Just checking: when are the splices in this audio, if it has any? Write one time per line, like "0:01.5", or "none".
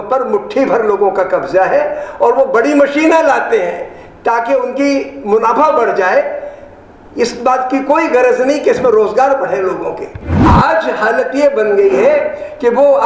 0:10.4